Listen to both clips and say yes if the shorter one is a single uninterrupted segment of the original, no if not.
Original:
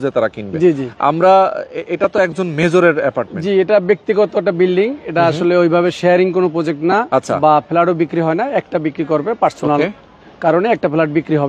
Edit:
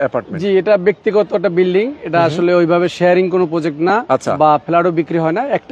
yes